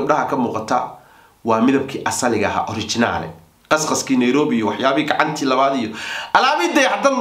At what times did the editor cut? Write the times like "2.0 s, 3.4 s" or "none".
none